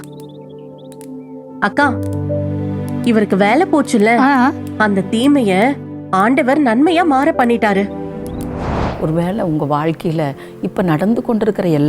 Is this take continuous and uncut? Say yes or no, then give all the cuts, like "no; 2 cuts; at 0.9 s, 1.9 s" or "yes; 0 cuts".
no; 1 cut; at 8.8 s